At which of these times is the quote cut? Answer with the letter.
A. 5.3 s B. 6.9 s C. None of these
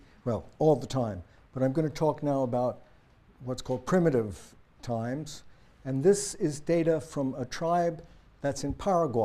A